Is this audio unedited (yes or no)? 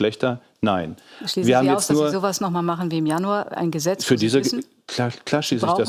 yes